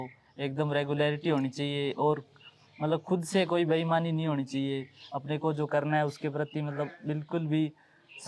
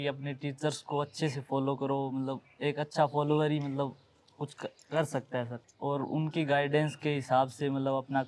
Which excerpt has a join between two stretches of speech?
second; 1 cut; at 5.6 s

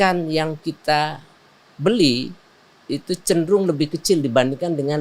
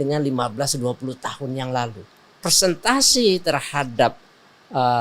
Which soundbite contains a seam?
second; 1 cut; at 2.4 s

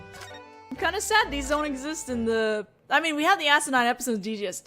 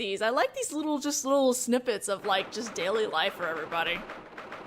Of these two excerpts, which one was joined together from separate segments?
second; 1 cut; at 2.2 s

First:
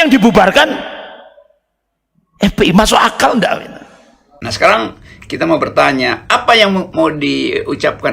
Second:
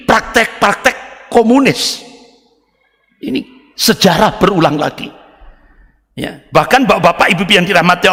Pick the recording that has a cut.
first; 1 cut; at 4.4 s

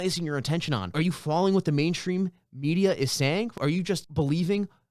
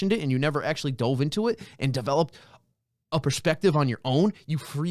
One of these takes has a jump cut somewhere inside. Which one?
first; 2 cuts; at 0.9 s, 3.5 s

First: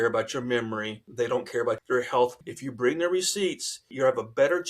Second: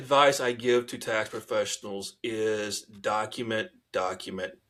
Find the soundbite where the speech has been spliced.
first; 4 cuts; at 1.0 s, 1.8 s, 2.4 s, 3.9 s

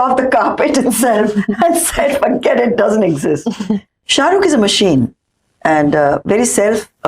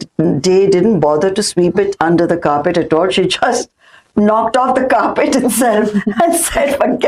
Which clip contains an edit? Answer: first; 1 cut; at 3.9 s

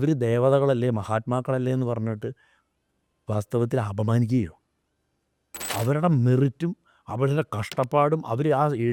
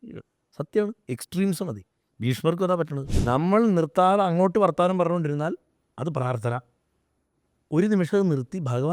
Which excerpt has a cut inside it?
second; 1 cut; at 3.1 s

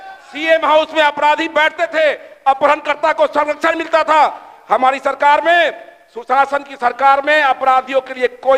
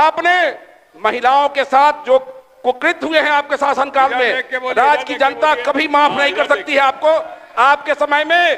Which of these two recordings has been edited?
second; 1 cut; at 7.4 s

